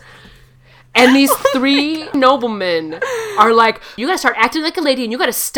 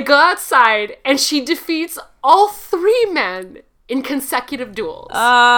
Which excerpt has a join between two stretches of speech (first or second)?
first